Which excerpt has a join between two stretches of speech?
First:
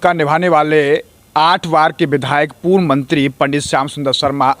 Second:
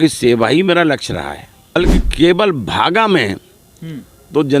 second; 1 cut; at 1.8 s

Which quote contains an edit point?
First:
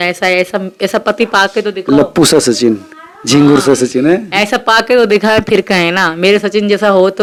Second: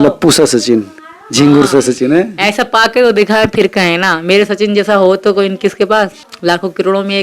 second; 1 cut; at 6.2 s

